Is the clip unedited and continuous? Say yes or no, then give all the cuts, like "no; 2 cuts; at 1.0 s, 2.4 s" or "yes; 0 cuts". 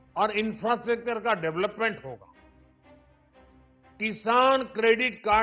no; 2 cuts; at 2.3 s, 4.0 s